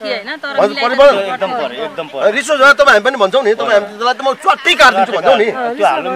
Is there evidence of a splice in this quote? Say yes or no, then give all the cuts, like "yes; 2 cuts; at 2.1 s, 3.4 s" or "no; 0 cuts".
no; 0 cuts